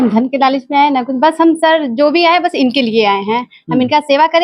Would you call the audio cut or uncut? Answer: uncut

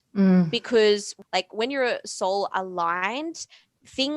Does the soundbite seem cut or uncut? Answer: cut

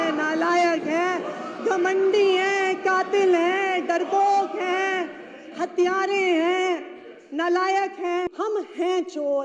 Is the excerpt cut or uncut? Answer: cut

